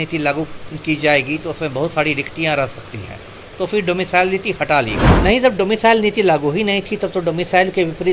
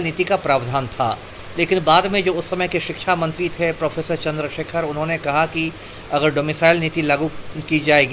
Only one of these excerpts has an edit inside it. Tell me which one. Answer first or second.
first